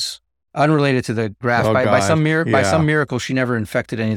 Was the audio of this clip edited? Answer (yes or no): yes